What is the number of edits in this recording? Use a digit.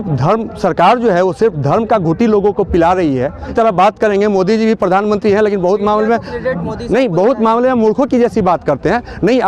1